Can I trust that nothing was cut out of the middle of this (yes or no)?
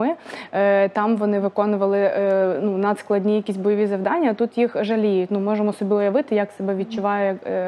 yes